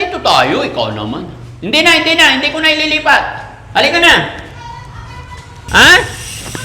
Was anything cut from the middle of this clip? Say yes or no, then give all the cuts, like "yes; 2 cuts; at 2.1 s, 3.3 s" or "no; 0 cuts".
no; 0 cuts